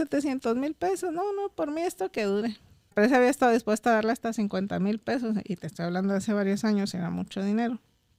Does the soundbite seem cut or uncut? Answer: cut